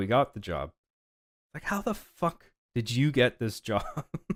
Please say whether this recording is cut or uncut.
uncut